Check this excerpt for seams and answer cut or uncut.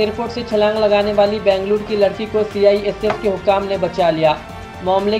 uncut